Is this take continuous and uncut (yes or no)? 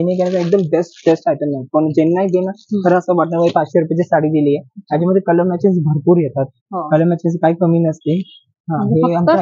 yes